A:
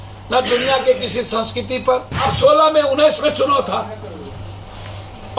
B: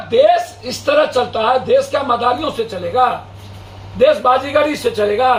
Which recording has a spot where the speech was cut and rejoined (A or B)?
A